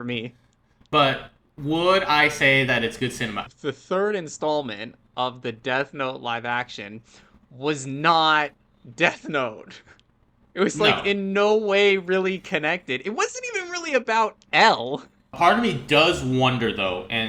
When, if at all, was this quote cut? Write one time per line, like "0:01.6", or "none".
0:03.5
0:15.2